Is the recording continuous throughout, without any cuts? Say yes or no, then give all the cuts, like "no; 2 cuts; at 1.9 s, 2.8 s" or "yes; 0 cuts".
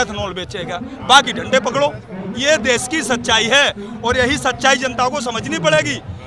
yes; 0 cuts